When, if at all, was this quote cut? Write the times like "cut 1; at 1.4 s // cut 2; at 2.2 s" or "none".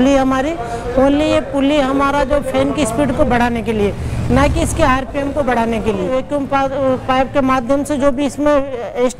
cut 1; at 6.1 s